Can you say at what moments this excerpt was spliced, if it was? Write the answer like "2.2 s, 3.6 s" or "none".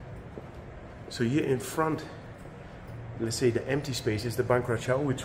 none